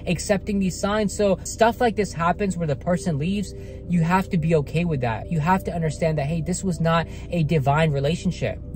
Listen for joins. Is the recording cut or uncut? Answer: cut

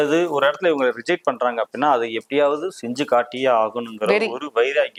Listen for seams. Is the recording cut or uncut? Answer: uncut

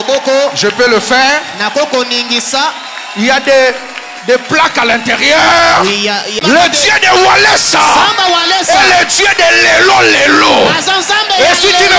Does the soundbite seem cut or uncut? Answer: cut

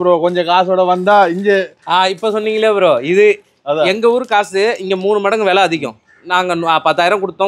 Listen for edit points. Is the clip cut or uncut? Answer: uncut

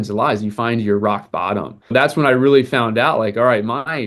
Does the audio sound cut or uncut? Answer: cut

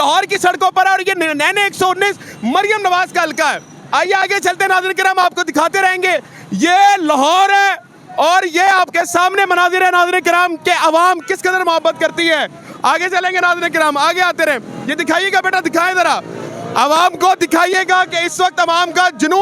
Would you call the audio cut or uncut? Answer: uncut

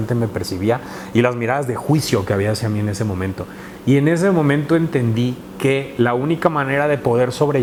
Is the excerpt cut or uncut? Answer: uncut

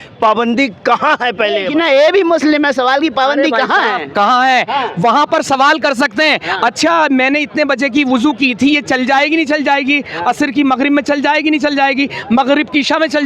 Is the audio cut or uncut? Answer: uncut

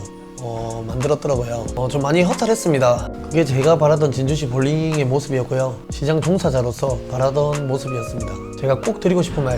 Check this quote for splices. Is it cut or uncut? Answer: cut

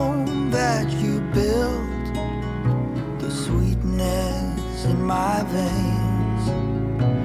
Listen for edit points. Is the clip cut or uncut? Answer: uncut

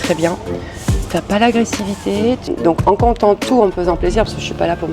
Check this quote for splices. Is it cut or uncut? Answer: cut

